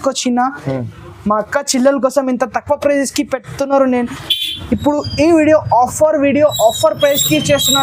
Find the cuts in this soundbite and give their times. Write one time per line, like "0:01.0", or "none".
none